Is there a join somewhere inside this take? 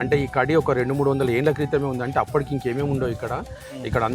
no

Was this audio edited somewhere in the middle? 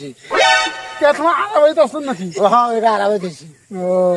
no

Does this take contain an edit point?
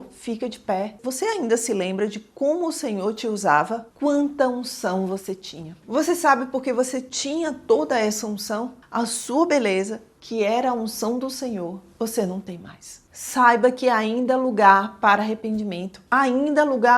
yes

